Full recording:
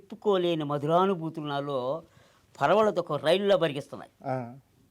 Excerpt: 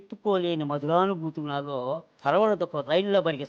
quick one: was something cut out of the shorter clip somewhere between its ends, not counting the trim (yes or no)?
yes